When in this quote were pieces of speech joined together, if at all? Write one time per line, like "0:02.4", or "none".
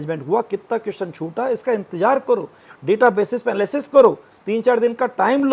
none